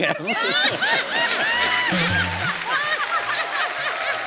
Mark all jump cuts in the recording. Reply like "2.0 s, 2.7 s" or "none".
none